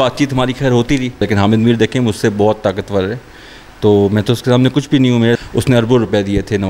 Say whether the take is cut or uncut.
cut